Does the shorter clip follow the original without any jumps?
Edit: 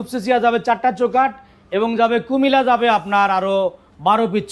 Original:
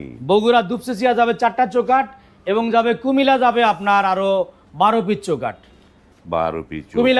yes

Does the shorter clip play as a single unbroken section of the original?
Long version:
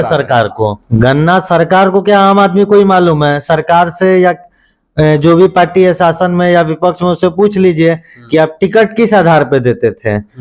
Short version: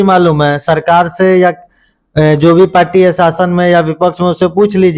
yes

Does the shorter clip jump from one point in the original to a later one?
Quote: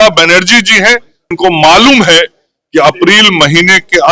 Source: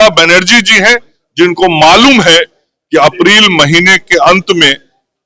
yes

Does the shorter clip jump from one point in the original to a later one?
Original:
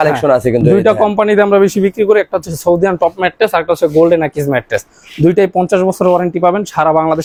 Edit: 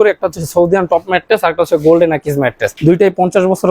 yes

